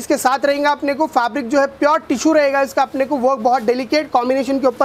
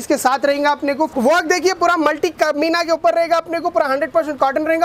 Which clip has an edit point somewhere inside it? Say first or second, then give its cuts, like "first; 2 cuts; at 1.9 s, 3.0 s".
second; 1 cut; at 1.1 s